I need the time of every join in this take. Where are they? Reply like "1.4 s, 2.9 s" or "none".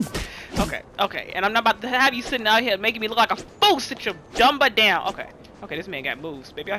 5.4 s